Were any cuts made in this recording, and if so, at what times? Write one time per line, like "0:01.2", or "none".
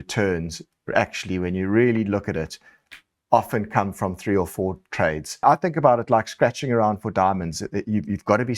0:05.4